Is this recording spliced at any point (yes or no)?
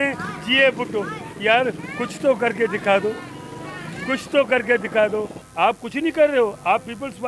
yes